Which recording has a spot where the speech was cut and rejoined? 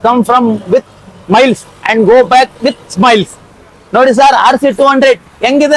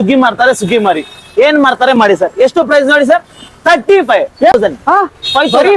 second; 1 cut; at 4.5 s

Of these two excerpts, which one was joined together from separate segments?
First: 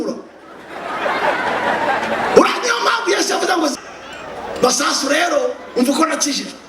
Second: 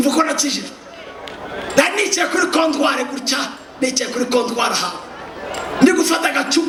first; 1 cut; at 3.7 s

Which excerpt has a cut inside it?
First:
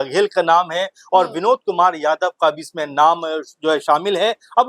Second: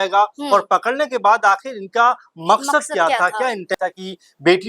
second; 1 cut; at 3.7 s

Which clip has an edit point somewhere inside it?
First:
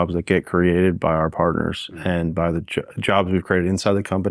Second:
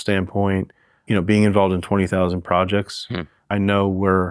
second; 2 cuts; at 0.9 s, 3.4 s

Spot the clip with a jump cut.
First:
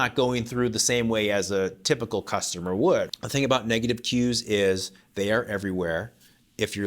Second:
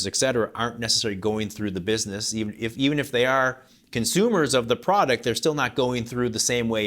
first; 1 cut; at 3.1 s

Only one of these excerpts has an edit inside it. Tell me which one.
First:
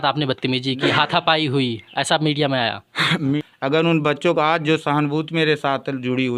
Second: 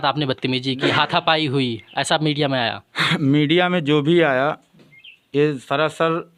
first; 1 cut; at 3.4 s

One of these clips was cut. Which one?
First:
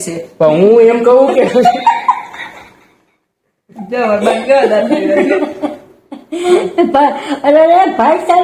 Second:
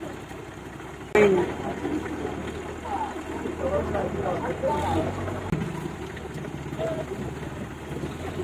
second; 2 cuts; at 1.2 s, 5.5 s

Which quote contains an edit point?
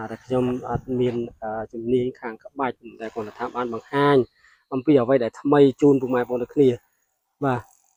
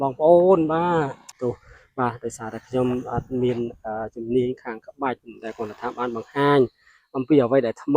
second; 1 cut; at 1.4 s

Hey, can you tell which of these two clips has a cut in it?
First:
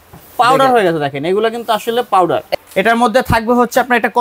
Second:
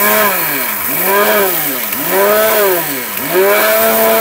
first; 1 cut; at 2.5 s

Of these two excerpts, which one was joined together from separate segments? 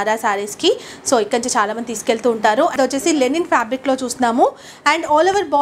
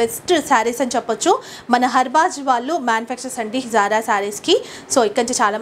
first; 1 cut; at 2.7 s

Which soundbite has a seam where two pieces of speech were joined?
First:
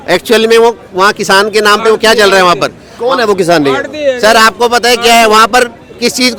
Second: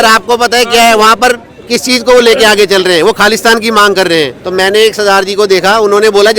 second; 1 cut; at 4.4 s

